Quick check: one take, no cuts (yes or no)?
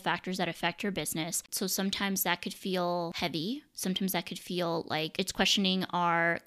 no